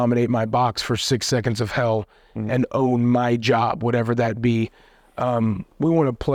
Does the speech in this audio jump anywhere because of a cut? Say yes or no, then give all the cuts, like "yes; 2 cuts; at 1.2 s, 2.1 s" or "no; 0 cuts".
no; 0 cuts